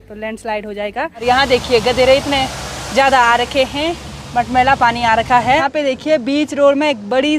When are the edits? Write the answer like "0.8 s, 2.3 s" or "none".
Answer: 1.2 s, 5.6 s